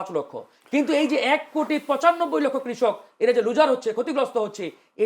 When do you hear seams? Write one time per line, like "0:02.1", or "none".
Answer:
none